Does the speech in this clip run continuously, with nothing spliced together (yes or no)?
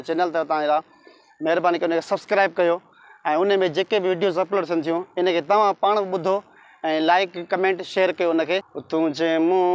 no